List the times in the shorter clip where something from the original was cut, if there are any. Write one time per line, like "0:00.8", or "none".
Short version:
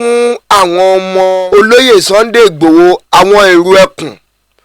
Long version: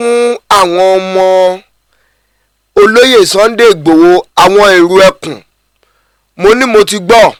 0:01.4